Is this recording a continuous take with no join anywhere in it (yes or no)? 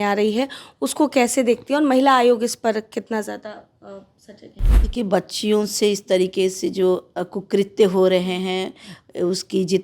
no